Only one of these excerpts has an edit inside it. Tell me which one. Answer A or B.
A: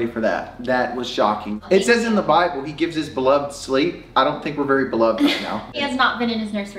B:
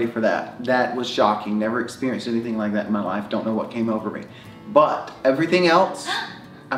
A